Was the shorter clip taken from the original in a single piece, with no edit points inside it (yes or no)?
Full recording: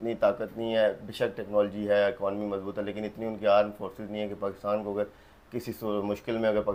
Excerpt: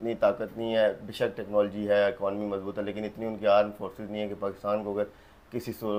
yes